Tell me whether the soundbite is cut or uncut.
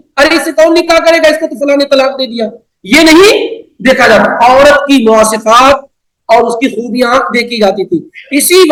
uncut